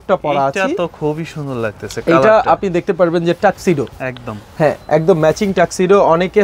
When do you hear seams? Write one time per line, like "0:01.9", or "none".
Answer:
none